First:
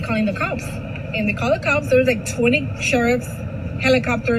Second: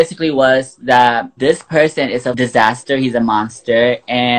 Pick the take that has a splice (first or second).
second